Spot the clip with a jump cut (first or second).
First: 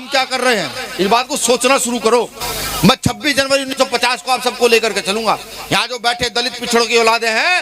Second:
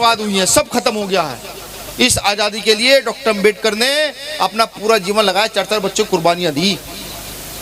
first